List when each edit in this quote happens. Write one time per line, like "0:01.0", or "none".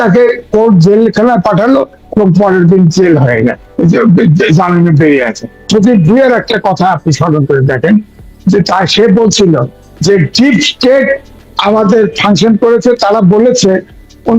0:05.6